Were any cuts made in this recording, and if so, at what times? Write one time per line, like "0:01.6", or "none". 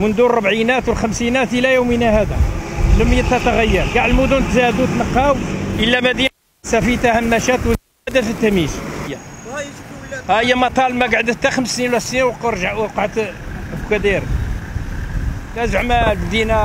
0:09.1